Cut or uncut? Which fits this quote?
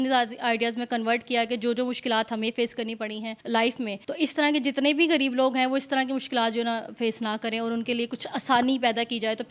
cut